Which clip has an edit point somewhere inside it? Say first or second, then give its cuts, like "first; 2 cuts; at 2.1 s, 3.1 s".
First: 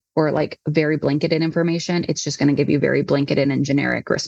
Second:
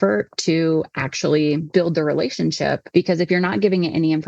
second; 2 cuts; at 1.6 s, 2.8 s